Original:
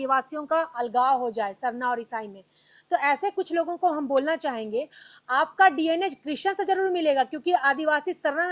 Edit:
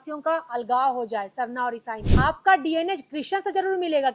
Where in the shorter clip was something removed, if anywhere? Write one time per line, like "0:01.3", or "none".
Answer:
0:02.0

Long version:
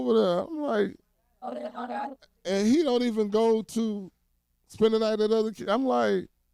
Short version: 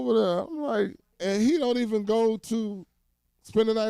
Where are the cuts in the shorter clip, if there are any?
0:01.1

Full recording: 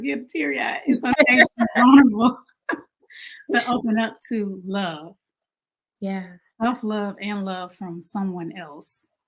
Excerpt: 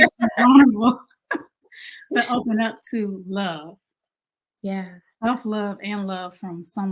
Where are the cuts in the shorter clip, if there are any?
none

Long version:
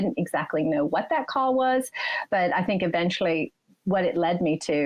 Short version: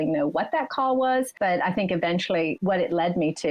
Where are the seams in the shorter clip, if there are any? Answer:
0:01.3
0:02.6

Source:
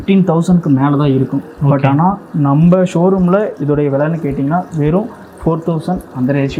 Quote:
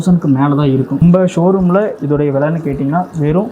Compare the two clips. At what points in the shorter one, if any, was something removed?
0:01.0

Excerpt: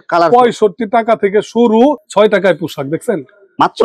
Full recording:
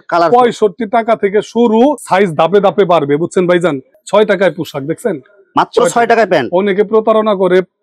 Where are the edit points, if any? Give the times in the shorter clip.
0:02.0

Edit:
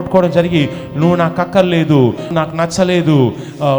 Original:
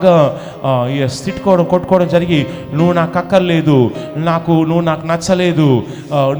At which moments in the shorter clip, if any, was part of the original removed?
0:02.3

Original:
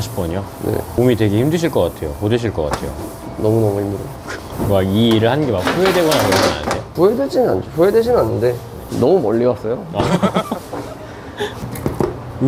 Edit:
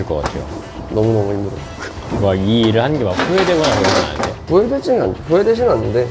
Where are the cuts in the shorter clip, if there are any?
none

